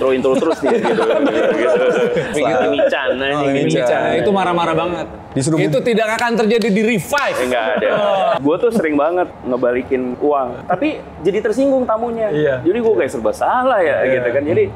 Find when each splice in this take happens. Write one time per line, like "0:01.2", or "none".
0:02.3
0:08.4
0:09.4
0:10.4